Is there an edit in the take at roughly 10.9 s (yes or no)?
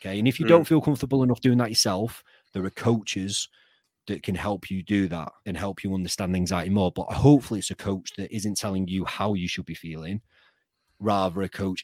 no